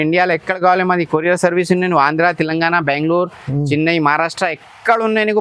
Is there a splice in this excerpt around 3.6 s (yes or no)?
no